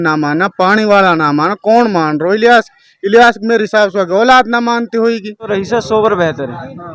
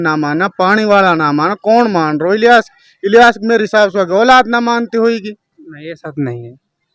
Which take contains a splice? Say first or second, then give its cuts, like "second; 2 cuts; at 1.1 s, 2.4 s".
first; 1 cut; at 5.5 s